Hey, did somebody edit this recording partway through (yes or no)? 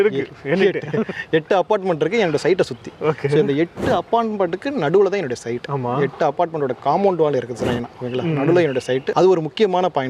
no